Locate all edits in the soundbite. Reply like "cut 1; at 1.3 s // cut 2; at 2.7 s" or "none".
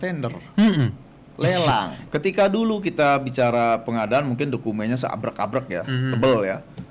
cut 1; at 2.0 s